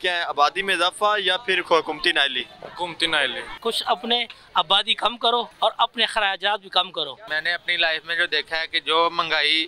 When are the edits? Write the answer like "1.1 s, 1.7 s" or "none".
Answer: 3.5 s, 5.5 s, 7.3 s